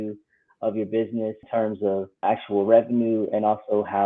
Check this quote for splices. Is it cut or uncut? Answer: cut